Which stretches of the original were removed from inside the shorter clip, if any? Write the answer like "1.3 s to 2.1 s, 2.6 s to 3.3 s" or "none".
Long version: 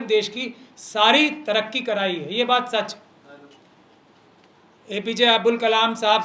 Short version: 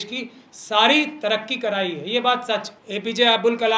3.0 s to 4.8 s